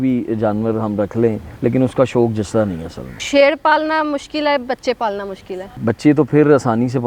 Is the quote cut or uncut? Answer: cut